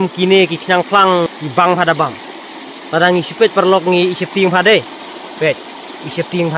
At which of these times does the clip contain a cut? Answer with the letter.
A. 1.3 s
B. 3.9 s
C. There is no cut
A